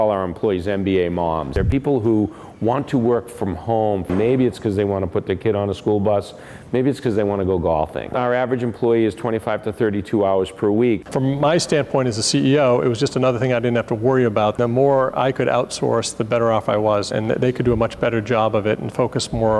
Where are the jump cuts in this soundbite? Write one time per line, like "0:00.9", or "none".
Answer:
0:01.6
0:04.1
0:08.1
0:11.1
0:14.6
0:17.1